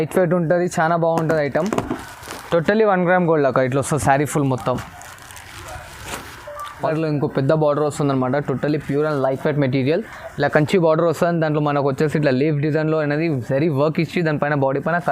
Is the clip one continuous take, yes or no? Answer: no